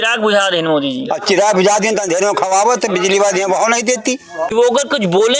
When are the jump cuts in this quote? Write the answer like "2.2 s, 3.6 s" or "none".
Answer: 4.3 s